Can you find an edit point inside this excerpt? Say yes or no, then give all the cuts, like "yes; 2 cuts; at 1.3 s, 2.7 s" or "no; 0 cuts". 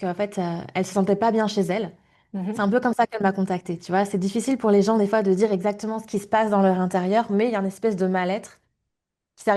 no; 0 cuts